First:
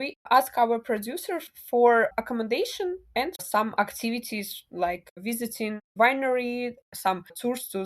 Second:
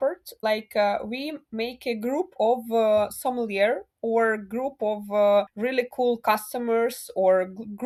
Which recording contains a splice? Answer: first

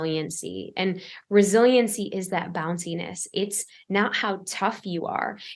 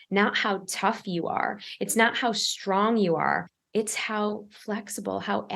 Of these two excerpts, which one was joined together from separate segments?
second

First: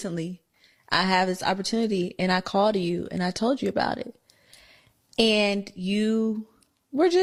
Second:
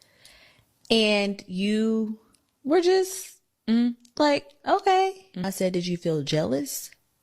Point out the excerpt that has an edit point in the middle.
second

